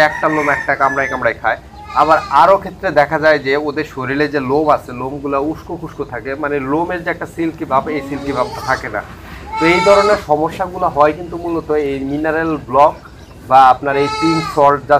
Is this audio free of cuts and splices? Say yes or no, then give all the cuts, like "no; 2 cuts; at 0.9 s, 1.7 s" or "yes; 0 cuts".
yes; 0 cuts